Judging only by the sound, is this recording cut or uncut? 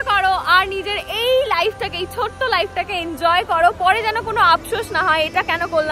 uncut